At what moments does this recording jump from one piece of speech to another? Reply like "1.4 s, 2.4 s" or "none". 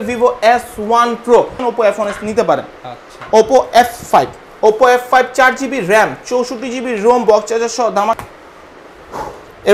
1.6 s, 8.2 s